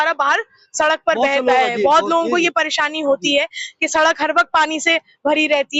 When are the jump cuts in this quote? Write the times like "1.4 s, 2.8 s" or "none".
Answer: none